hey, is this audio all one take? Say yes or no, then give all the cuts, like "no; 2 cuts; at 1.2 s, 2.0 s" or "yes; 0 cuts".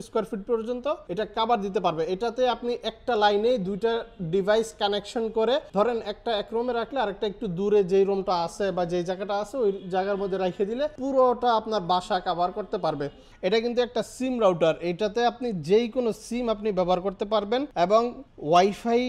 no; 5 cuts; at 1.0 s, 5.7 s, 11.0 s, 13.2 s, 18.0 s